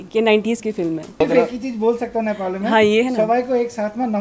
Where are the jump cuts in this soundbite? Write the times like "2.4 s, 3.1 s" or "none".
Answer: 1.2 s

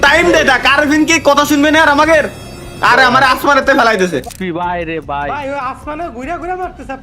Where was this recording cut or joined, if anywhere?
4.3 s

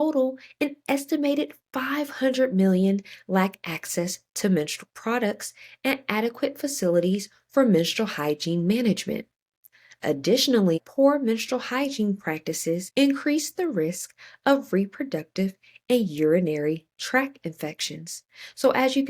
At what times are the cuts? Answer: 10.8 s, 12.9 s

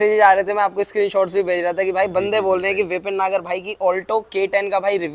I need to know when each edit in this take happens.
none

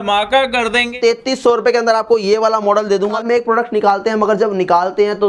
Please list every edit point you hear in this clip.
0.9 s, 3.2 s

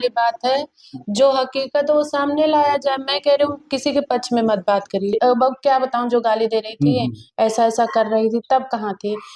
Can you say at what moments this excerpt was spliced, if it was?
5.2 s

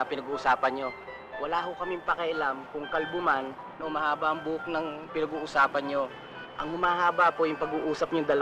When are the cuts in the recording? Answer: none

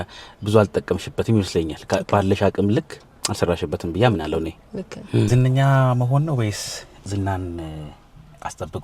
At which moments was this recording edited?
5.3 s

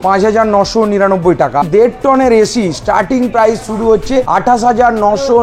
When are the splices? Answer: 1.6 s, 4.3 s

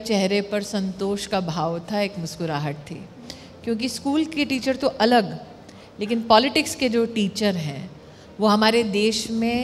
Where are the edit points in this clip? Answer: none

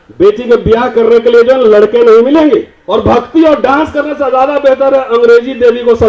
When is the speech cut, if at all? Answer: 2.8 s

